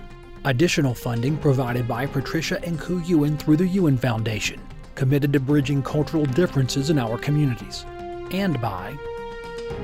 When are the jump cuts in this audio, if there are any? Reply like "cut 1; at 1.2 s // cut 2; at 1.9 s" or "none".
cut 1; at 8.9 s